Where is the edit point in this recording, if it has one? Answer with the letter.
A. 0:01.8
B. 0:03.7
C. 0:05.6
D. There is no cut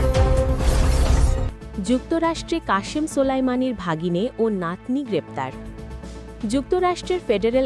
D